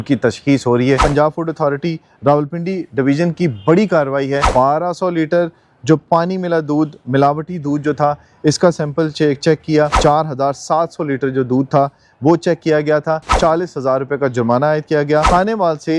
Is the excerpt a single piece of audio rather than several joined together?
no; 5 cuts; at 1.0 s, 4.5 s, 9.9 s, 13.3 s, 15.3 s

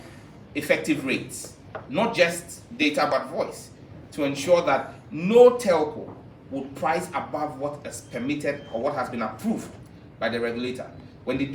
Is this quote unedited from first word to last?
yes; 0 cuts

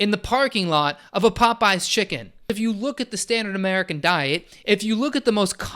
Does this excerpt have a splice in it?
yes; 1 cut; at 2.5 s

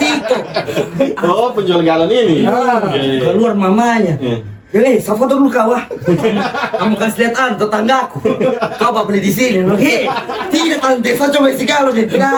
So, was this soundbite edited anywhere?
no; 0 cuts

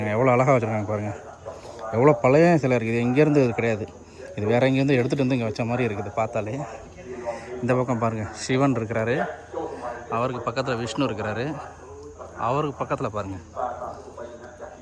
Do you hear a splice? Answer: no; 0 cuts

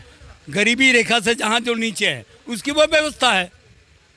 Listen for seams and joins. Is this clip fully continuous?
yes; 0 cuts

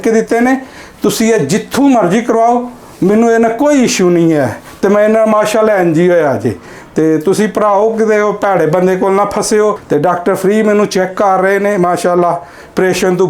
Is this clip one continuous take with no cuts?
no; 1 cut; at 9.8 s

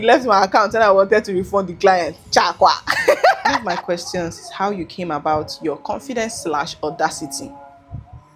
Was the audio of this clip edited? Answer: yes; 1 cut; at 3.6 s

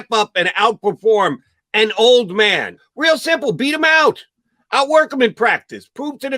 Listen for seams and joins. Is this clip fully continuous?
no; 1 cut; at 2.8 s

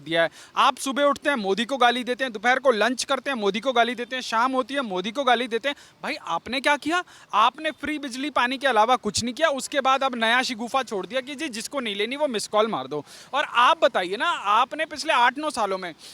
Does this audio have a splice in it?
no; 0 cuts

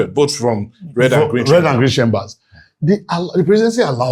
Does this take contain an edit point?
no; 0 cuts

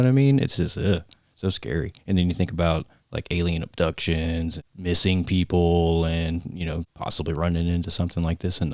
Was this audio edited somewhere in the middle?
no; 0 cuts

